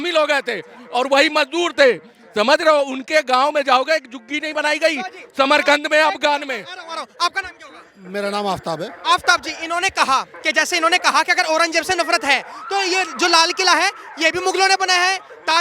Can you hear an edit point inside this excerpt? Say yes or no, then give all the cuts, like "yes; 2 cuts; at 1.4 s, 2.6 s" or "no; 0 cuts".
no; 0 cuts